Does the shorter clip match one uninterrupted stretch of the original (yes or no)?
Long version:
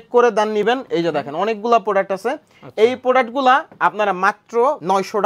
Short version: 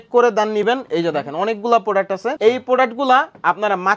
no